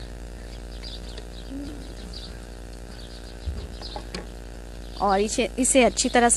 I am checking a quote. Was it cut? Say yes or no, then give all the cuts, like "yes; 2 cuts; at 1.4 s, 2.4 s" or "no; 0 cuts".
no; 0 cuts